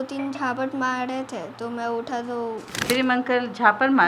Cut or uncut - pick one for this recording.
cut